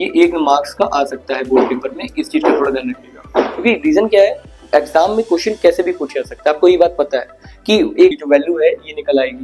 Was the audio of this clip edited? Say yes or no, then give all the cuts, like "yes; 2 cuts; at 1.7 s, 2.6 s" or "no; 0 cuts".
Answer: yes; 1 cut; at 8.1 s